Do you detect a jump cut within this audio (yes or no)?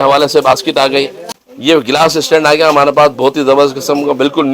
yes